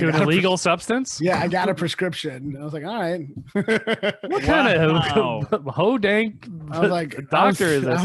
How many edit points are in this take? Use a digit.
0